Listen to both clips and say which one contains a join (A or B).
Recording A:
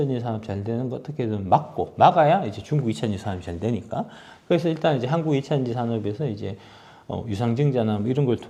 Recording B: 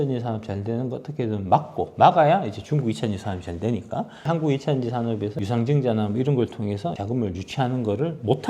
B